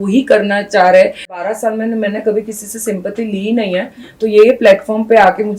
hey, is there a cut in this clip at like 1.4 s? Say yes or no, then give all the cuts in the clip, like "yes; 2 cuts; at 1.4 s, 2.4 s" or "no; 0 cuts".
yes; 1 cut; at 1.4 s